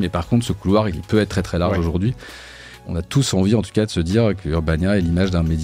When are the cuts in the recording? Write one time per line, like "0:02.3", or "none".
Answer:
0:01.0
0:02.7
0:04.4